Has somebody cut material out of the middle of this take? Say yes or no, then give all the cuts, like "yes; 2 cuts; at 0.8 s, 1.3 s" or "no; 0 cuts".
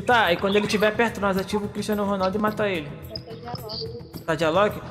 no; 0 cuts